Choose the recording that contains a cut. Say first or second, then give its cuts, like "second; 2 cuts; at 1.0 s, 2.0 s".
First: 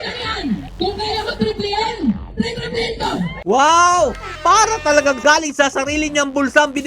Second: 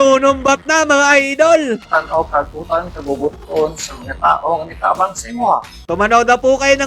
second; 2 cuts; at 1.8 s, 5.7 s